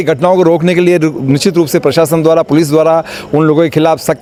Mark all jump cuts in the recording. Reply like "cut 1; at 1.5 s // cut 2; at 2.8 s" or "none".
none